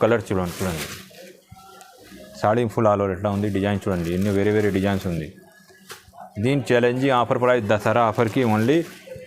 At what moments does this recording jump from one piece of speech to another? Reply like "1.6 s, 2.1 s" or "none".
none